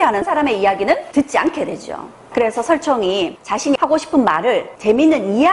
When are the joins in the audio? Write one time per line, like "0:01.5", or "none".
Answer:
0:03.3